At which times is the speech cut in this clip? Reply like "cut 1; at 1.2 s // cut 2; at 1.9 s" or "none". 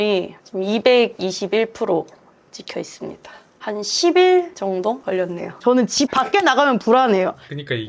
cut 1; at 3.6 s // cut 2; at 5.6 s